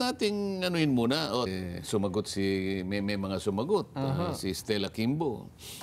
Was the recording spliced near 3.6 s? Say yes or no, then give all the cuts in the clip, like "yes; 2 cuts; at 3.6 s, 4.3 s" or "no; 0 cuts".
no; 1 cut; at 1.5 s